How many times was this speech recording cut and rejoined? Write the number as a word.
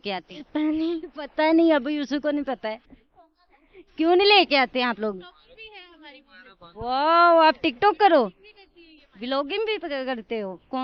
zero